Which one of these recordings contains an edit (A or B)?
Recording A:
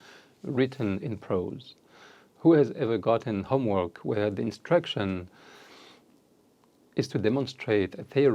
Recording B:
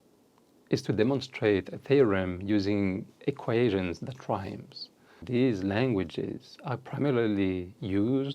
B